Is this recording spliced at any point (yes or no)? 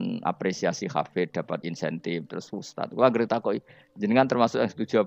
no